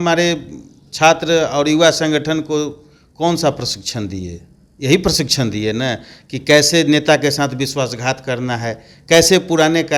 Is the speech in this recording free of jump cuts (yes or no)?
yes